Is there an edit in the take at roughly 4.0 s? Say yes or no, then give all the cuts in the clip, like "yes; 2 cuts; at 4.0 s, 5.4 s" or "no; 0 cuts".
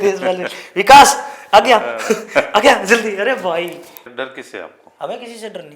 yes; 1 cut; at 4.0 s